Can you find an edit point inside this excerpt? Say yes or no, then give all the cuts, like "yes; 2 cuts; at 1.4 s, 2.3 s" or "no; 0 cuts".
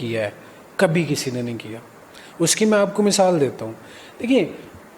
no; 0 cuts